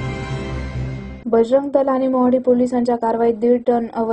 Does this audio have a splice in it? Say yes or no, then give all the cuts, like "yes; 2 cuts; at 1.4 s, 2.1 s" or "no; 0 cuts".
yes; 1 cut; at 1.0 s